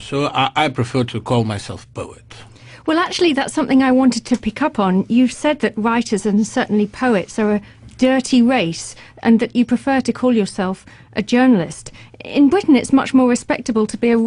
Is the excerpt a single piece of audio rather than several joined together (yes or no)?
no